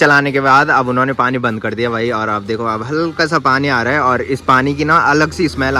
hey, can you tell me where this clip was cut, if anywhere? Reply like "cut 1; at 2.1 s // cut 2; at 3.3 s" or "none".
none